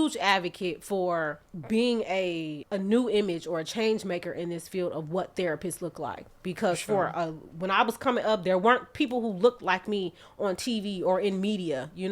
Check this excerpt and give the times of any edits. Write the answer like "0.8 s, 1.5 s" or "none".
1.5 s, 2.6 s